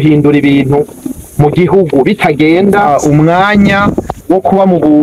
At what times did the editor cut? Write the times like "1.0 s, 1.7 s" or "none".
2.9 s